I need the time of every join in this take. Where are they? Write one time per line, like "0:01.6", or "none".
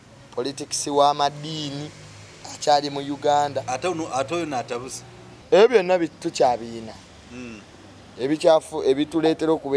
0:05.3